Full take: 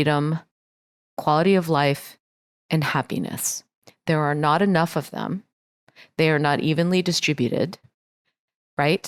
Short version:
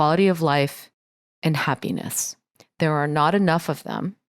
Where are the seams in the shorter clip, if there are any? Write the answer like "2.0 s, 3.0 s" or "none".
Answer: none